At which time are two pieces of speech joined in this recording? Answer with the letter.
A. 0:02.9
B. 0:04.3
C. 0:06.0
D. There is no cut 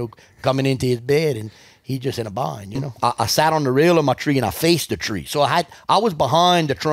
A